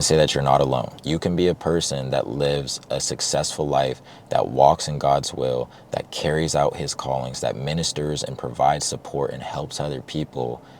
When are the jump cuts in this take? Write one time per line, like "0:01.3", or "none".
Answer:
0:01.0